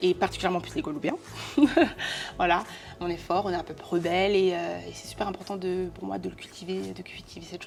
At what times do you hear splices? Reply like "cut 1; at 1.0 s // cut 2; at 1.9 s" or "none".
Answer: none